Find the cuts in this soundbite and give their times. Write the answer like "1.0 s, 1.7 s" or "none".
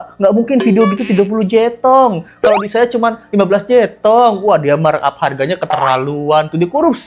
none